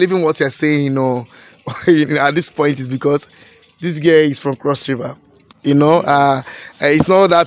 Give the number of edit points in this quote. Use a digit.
0